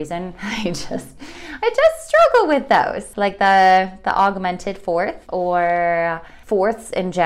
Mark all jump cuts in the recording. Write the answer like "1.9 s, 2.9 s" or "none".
3.0 s, 5.2 s, 6.3 s